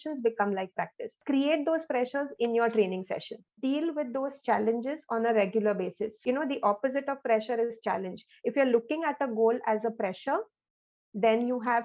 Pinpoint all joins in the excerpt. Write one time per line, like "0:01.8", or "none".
0:01.2
0:03.4
0:06.2